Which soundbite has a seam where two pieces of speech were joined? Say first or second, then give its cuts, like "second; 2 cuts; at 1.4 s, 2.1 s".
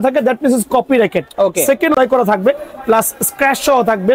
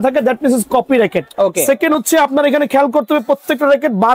first; 1 cut; at 2.0 s